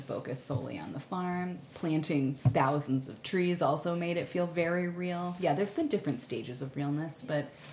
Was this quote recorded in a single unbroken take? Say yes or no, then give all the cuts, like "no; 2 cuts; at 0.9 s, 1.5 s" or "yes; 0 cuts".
yes; 0 cuts